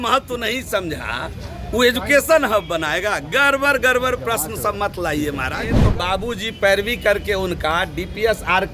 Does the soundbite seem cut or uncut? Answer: cut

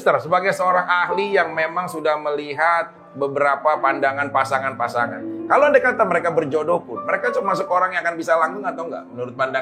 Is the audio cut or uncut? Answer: uncut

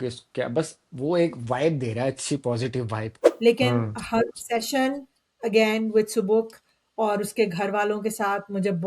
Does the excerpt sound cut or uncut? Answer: cut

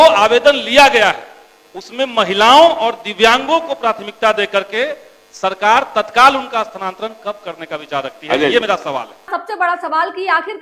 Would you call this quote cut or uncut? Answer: uncut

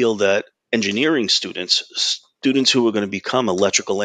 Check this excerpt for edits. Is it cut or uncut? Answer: uncut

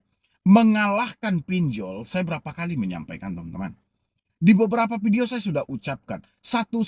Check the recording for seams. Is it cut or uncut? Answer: uncut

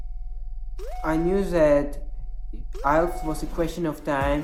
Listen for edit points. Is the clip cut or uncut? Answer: uncut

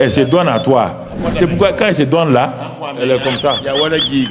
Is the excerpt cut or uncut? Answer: uncut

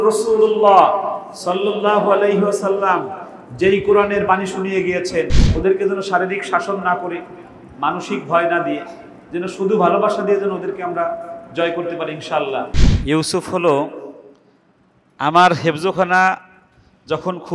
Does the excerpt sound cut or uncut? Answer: cut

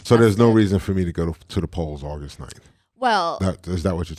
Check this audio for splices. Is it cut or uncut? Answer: uncut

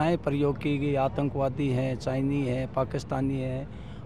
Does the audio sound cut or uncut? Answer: uncut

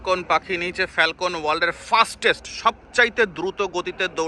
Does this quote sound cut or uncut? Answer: uncut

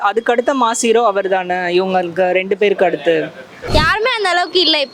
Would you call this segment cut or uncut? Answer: cut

